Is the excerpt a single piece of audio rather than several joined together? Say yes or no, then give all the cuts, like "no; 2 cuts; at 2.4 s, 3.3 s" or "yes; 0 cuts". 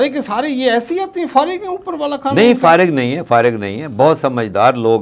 yes; 0 cuts